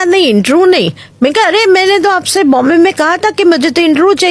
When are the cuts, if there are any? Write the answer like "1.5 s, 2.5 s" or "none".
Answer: none